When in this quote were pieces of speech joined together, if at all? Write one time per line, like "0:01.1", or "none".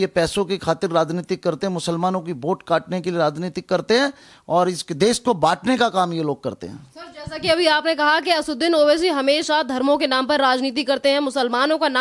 none